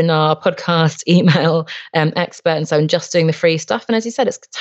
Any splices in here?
no; 0 cuts

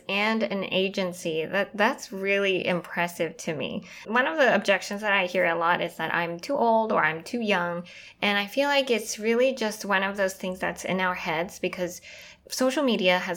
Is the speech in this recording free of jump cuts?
no; 2 cuts; at 4.0 s, 12.3 s

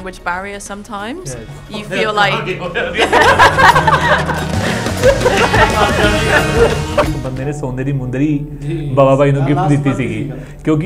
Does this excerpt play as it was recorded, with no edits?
no; 1 cut; at 7.1 s

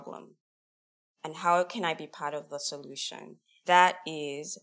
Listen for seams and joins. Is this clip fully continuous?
yes; 0 cuts

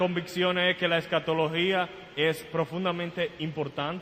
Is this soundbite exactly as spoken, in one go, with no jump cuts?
no; 1 cut; at 1.6 s

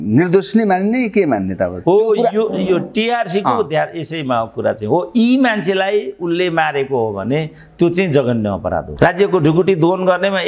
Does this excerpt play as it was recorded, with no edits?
no; 1 cut; at 8.9 s

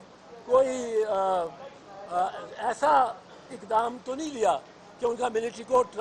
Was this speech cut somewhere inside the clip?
no; 0 cuts

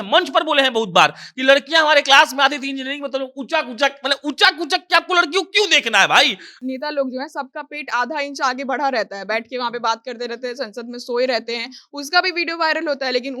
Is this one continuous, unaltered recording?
no; 1 cut; at 6.6 s

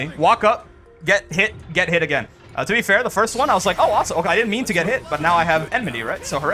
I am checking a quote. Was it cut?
no; 0 cuts

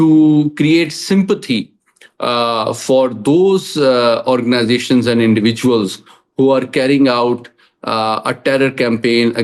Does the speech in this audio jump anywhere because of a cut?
no; 0 cuts

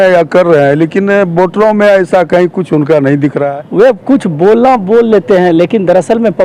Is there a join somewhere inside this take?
yes; 1 cut; at 3.4 s

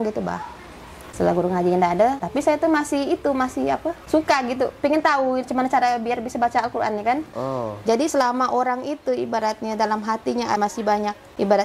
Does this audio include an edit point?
yes; 2 cuts; at 1.0 s, 7.3 s

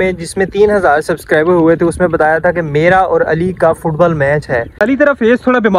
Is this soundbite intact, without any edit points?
no; 1 cut; at 4.8 s

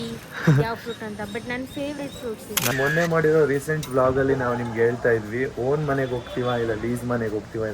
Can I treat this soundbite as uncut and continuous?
no; 1 cut; at 2.7 s

